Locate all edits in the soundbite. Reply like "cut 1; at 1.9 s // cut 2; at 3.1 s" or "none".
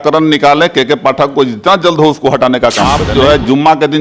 cut 1; at 2.9 s